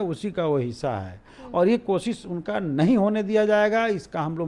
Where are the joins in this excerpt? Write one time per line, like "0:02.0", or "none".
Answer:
none